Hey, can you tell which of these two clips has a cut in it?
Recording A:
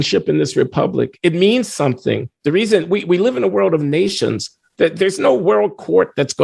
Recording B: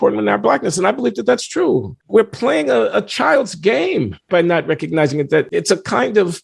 B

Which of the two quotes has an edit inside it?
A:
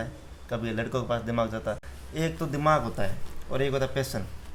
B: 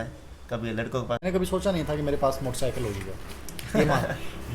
B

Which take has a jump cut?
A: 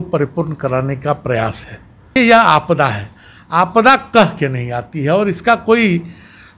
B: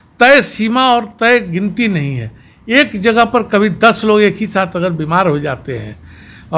A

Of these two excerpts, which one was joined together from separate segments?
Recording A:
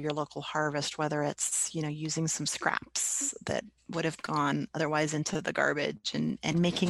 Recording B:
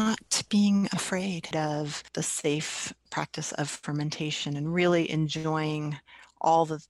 B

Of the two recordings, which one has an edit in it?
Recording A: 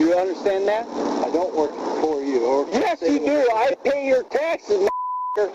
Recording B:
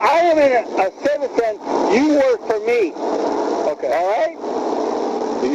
A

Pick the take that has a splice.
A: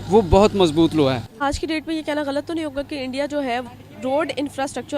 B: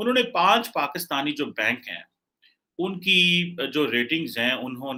A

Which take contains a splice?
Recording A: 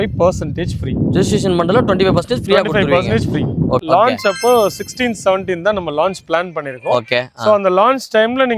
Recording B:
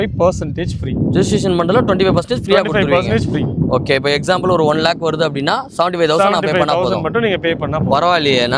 A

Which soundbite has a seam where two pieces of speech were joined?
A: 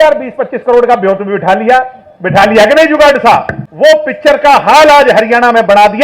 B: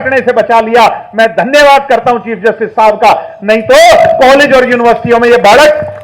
A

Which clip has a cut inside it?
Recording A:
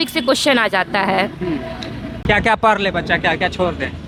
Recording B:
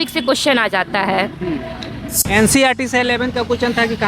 B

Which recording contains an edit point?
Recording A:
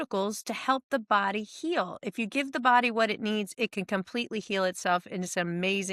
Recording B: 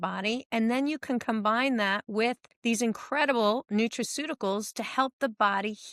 B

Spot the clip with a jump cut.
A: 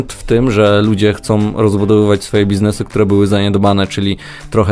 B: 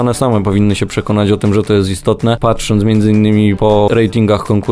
B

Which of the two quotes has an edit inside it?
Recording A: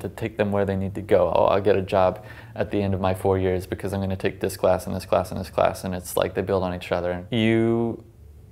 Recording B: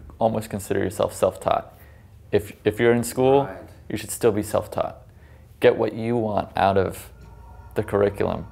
A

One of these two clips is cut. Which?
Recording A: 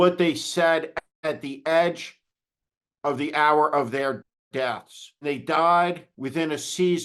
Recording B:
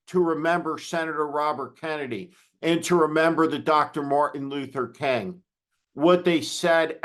A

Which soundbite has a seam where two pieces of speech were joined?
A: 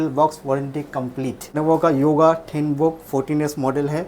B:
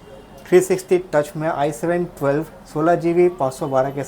A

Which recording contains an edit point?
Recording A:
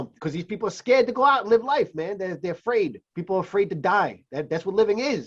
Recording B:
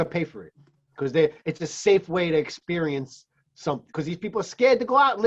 A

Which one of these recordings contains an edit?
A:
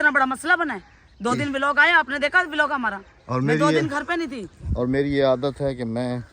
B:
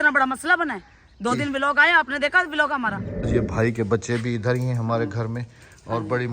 B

